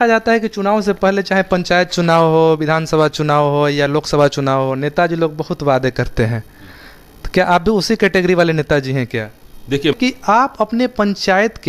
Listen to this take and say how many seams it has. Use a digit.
1